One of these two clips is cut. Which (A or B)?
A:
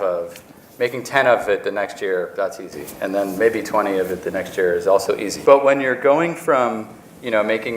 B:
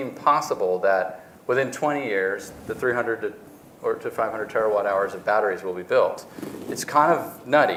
A